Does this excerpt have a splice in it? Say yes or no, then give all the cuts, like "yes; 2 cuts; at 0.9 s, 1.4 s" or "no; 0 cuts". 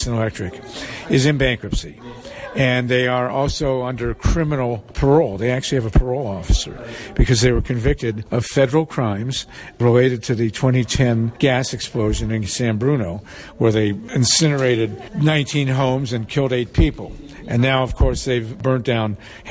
yes; 7 cuts; at 4.9 s, 8.2 s, 9.8 s, 11.3 s, 14.0 s, 15.0 s, 18.6 s